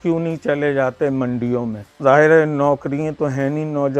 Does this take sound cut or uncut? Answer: cut